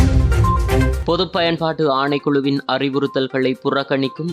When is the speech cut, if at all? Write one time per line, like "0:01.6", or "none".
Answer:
0:01.0